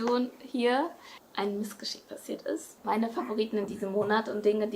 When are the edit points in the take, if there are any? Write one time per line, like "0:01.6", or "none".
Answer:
0:02.8